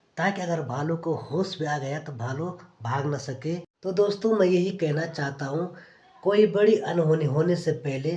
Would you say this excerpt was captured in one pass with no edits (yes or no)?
no